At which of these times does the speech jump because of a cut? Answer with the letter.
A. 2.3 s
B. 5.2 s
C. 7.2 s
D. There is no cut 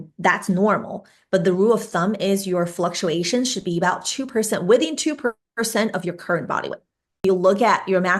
C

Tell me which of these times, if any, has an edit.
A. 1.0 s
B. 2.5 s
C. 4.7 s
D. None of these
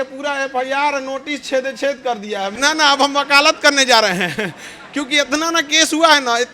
B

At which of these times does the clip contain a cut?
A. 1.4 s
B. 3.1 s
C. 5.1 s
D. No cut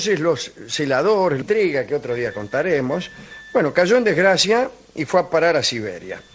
D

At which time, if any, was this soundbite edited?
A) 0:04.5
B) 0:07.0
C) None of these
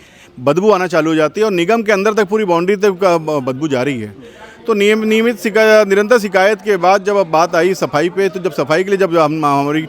C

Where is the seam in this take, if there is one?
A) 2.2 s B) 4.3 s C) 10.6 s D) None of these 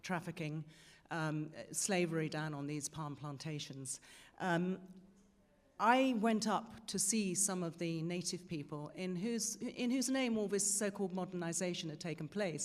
A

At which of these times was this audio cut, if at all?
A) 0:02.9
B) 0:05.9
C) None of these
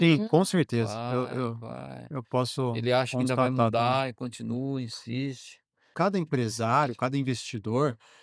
B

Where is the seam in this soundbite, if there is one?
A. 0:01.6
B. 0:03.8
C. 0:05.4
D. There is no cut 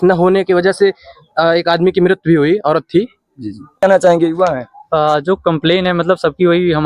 B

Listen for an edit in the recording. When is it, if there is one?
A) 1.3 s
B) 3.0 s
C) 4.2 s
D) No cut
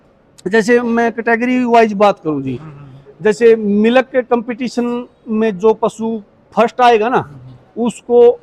D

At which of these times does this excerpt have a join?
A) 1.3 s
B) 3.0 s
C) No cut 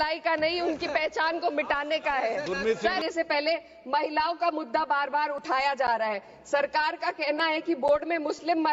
B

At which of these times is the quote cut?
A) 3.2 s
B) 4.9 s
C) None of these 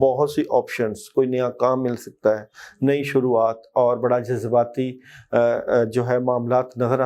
C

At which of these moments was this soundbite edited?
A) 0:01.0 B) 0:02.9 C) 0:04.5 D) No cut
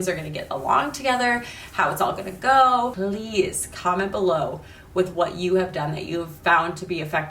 B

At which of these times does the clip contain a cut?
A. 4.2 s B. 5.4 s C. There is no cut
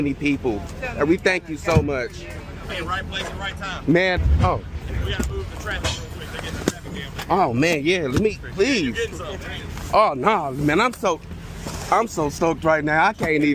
A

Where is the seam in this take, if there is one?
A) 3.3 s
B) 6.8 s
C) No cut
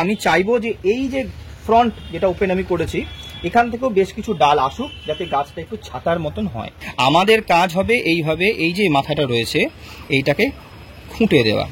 B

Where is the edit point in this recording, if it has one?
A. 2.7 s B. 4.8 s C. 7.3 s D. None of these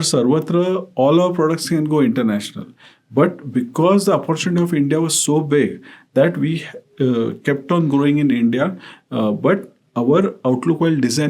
D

